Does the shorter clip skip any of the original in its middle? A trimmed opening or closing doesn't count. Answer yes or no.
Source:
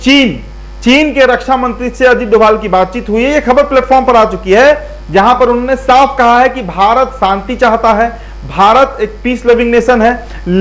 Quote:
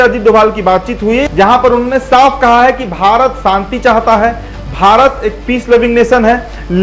yes